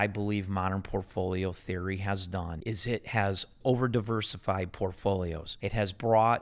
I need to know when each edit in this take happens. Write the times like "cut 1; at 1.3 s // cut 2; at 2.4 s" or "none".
cut 1; at 2.5 s // cut 2; at 5.5 s